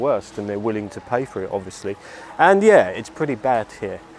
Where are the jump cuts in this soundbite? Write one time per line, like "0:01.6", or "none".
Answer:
none